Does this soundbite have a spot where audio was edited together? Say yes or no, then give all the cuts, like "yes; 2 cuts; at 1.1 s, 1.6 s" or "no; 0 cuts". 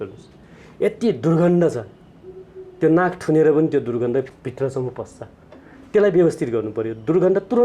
no; 0 cuts